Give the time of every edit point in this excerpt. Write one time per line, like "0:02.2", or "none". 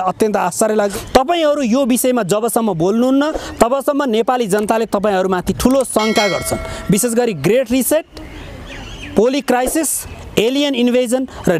0:00.9